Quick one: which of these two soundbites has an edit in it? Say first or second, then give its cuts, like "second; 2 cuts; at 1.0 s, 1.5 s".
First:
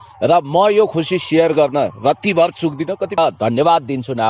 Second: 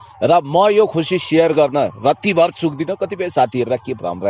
first; 1 cut; at 3.2 s